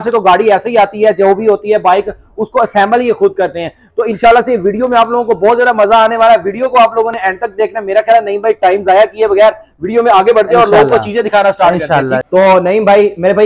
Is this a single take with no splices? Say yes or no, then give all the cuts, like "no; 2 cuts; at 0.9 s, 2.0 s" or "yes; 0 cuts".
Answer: yes; 0 cuts